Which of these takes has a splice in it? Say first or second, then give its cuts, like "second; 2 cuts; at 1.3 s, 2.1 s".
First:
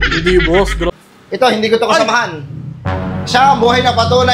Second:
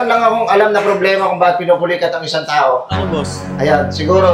first; 1 cut; at 0.9 s